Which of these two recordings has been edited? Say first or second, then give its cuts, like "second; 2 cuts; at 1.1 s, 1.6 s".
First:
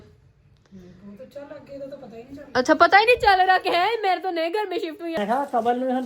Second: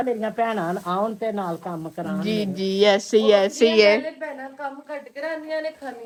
first; 1 cut; at 5.1 s